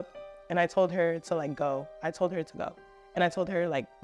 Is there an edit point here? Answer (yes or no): no